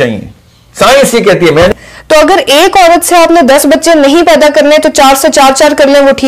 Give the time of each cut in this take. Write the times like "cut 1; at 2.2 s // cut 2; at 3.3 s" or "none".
cut 1; at 1.7 s